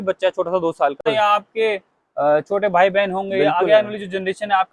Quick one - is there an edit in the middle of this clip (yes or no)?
yes